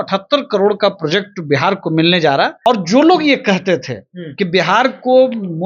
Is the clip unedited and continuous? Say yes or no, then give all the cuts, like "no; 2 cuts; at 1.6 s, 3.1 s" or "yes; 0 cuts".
no; 1 cut; at 2.7 s